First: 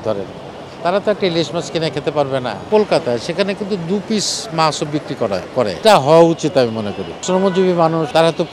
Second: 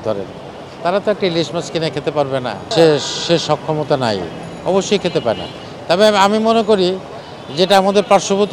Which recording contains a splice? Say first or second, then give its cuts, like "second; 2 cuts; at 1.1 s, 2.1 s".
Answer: first; 3 cuts; at 2.7 s, 5.7 s, 7.2 s